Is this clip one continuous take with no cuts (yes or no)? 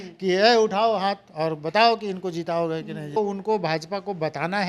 no